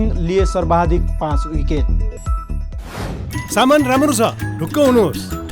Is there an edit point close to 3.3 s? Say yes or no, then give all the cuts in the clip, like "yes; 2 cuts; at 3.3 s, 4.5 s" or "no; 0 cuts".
yes; 1 cut; at 3.3 s